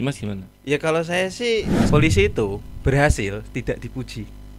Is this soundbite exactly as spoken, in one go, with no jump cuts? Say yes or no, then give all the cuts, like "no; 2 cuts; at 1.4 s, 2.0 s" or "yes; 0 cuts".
no; 1 cut; at 1.8 s